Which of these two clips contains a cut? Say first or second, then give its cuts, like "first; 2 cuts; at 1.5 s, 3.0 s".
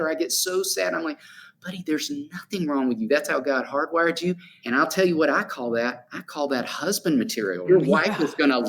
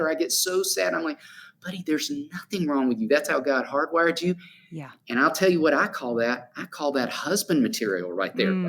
first; 2 cuts; at 4.5 s, 7.6 s